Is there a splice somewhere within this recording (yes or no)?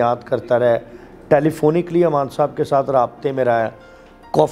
no